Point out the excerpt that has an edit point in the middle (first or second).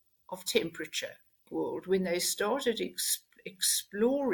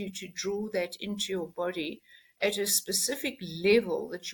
first